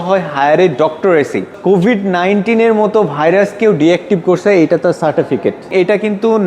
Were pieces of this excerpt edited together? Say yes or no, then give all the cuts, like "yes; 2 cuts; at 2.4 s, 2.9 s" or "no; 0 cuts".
yes; 2 cuts; at 1.5 s, 5.7 s